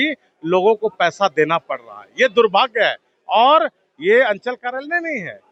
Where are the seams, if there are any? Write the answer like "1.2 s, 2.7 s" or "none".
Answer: none